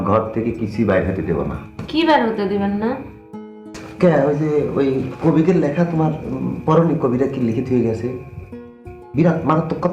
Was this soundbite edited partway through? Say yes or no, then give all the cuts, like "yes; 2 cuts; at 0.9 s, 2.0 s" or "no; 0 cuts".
no; 0 cuts